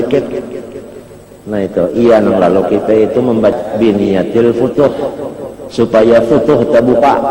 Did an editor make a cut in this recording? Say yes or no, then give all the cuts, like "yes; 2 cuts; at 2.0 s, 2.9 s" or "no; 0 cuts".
yes; 1 cut; at 3.5 s